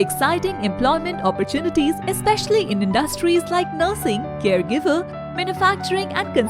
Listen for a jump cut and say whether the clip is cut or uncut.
uncut